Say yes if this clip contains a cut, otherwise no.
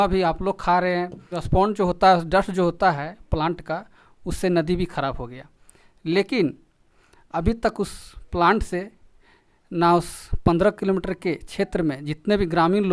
yes